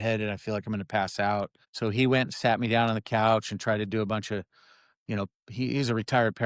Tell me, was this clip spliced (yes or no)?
yes